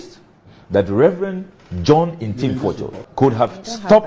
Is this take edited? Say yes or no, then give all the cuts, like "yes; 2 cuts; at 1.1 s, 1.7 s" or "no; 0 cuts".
yes; 1 cut; at 2.9 s